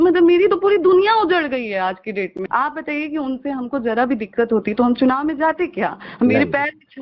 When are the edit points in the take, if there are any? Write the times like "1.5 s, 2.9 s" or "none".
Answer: 2.4 s